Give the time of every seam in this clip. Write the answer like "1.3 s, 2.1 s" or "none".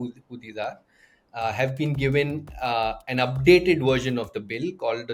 none